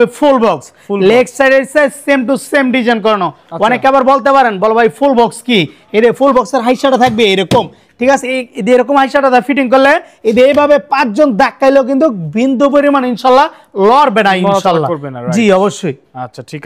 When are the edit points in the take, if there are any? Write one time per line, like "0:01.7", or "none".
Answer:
none